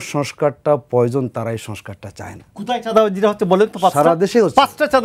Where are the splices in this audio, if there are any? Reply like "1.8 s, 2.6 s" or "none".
2.5 s